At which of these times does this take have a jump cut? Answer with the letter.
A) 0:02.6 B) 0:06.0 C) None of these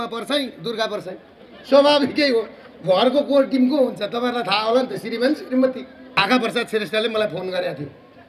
B